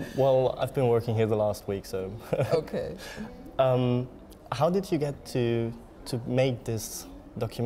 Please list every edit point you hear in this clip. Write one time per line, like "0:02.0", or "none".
0:04.2